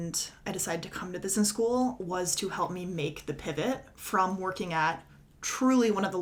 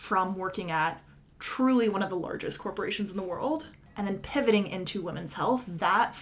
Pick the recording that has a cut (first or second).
second